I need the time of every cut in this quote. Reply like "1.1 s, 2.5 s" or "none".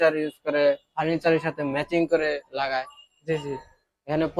none

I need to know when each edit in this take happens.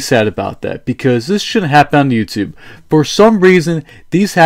none

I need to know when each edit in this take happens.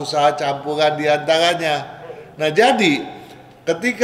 none

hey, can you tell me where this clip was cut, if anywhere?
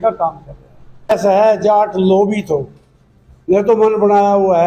1.1 s

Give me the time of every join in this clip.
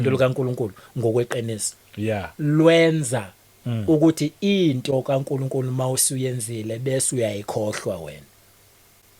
none

